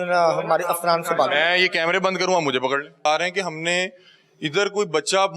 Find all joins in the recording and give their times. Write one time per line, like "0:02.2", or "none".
0:03.1